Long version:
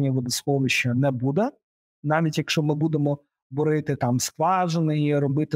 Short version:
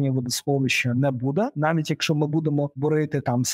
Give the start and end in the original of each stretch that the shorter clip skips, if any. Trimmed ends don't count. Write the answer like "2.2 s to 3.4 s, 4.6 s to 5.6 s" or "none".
1.5 s to 2.0 s, 3.2 s to 3.5 s